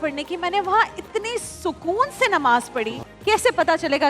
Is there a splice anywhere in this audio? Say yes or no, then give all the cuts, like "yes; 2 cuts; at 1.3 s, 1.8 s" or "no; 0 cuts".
yes; 1 cut; at 3.0 s